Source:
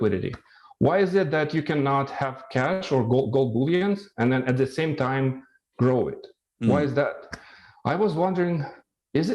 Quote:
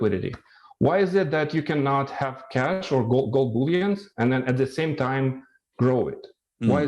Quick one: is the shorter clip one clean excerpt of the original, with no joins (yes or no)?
yes